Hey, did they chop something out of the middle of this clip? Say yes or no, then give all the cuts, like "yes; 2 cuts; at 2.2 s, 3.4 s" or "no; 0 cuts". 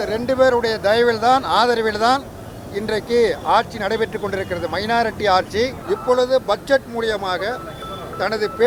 yes; 1 cut; at 5.8 s